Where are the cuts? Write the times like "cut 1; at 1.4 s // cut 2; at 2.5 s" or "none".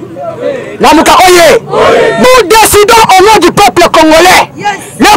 cut 1; at 2.2 s